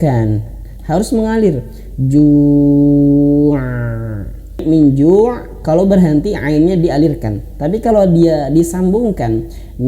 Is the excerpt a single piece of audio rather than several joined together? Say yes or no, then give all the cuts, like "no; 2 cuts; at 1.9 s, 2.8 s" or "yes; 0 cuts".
no; 1 cut; at 4.6 s